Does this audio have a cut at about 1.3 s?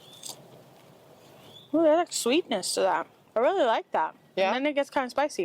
yes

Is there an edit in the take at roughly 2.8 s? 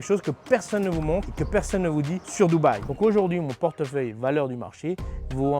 yes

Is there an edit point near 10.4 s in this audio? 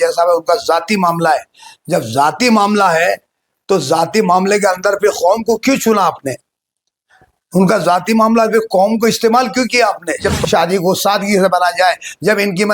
yes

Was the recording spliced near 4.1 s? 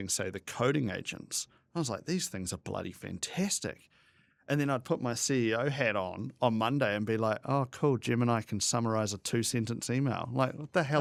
no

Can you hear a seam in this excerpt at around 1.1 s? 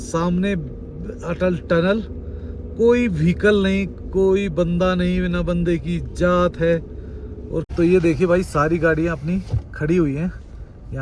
no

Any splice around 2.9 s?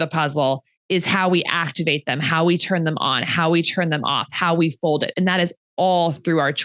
no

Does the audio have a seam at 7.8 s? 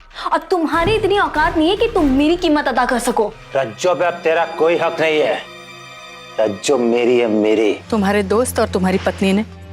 yes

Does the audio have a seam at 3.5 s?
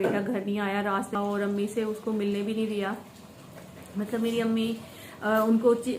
no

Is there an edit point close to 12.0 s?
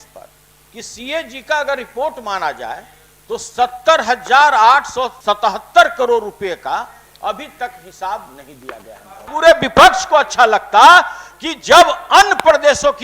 no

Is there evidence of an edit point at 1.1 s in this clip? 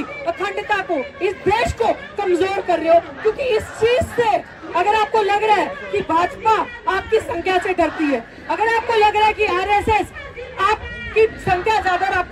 no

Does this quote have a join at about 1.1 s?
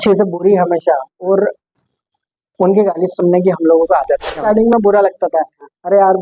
no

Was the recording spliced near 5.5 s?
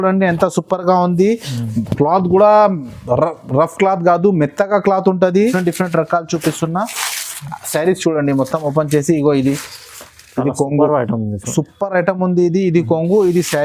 yes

